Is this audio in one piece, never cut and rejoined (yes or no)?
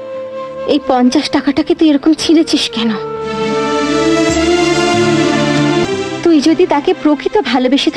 no